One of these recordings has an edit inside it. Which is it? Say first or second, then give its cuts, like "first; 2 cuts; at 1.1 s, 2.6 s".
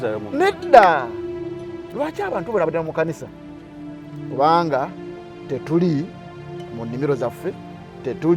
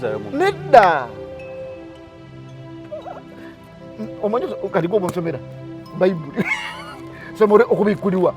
first; 1 cut; at 1.6 s